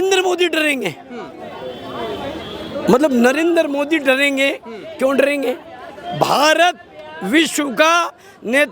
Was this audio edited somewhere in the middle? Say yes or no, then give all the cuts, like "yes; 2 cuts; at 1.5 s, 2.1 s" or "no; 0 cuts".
no; 0 cuts